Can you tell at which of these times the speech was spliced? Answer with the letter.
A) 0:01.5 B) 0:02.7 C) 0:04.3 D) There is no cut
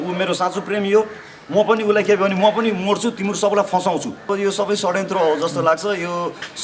C